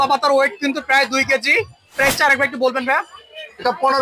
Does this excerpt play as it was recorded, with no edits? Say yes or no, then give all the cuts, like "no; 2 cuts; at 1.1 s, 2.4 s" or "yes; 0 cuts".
yes; 0 cuts